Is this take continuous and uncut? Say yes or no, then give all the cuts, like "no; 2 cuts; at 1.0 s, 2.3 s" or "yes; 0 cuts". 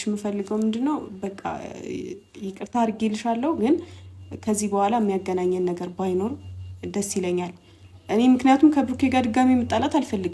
yes; 0 cuts